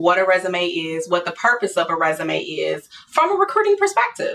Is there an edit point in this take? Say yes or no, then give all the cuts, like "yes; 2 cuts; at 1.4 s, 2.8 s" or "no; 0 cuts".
no; 0 cuts